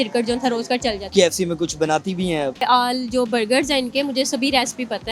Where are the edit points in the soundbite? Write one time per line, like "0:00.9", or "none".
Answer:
0:01.0
0:02.6